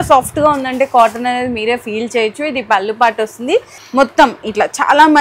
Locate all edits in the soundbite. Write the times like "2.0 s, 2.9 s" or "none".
3.8 s

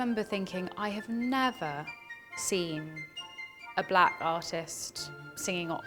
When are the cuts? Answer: none

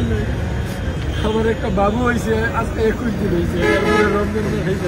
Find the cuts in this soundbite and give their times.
none

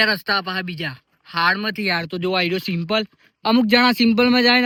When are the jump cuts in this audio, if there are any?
none

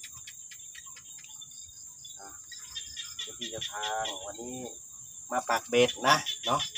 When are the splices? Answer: none

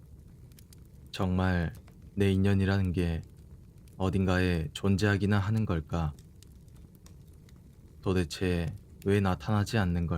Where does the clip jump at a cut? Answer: 1.1 s

